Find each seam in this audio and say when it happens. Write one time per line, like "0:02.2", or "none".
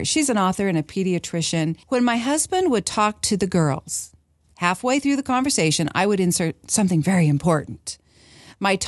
0:01.8